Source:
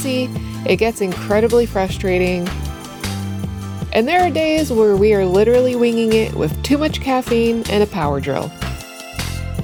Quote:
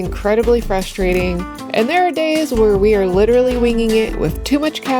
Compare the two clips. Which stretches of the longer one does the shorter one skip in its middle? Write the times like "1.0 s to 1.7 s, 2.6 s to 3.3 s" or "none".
2.6 s to 3.7 s